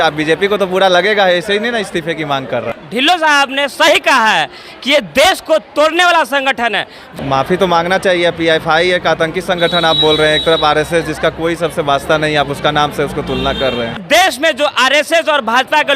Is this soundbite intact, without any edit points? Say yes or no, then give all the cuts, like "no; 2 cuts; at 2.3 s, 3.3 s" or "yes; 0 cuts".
no; 3 cuts; at 2.7 s, 7.0 s, 14.0 s